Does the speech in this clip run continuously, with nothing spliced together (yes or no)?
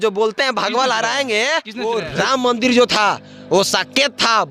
no